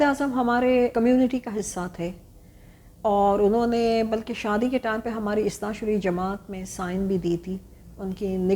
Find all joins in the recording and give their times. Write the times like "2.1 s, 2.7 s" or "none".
0.9 s